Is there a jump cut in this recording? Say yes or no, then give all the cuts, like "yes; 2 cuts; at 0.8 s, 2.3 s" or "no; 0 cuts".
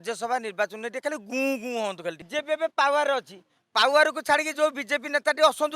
yes; 1 cut; at 2.2 s